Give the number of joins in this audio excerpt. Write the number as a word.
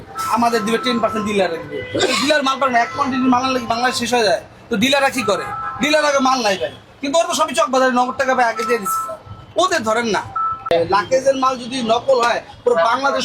one